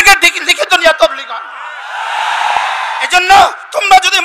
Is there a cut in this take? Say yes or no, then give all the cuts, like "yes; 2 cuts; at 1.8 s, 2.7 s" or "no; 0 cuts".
yes; 1 cut; at 3.1 s